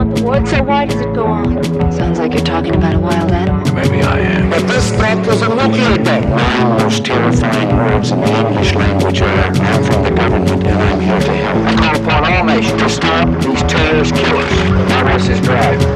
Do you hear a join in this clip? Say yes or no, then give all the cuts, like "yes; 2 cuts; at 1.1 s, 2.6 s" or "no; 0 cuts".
no; 0 cuts